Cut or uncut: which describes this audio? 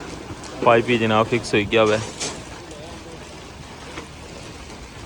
uncut